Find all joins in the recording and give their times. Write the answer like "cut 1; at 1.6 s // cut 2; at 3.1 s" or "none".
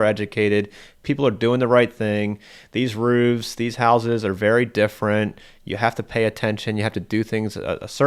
none